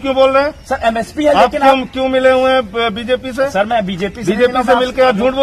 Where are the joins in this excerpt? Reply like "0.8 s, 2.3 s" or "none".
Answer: none